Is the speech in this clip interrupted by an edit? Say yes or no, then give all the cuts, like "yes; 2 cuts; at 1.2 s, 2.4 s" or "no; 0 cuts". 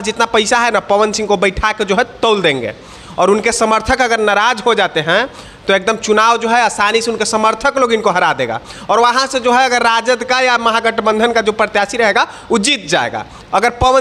no; 0 cuts